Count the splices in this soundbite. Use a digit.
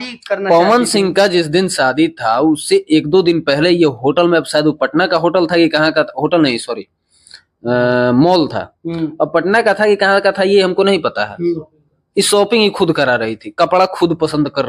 0